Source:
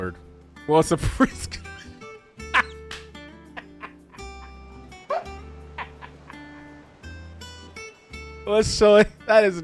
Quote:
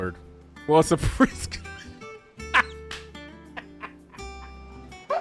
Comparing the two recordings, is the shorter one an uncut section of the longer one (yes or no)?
yes